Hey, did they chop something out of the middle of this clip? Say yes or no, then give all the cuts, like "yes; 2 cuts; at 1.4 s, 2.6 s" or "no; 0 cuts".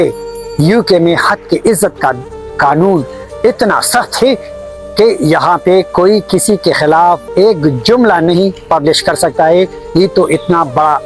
no; 0 cuts